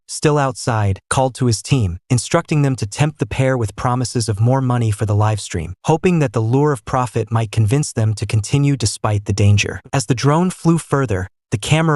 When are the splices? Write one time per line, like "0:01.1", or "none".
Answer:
0:09.7